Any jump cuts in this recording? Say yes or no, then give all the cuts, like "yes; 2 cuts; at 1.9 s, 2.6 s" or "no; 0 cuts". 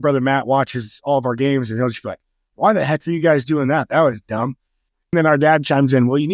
yes; 1 cut; at 5.1 s